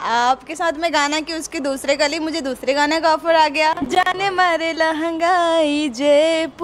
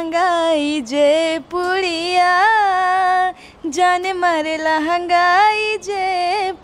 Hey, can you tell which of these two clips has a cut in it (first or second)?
first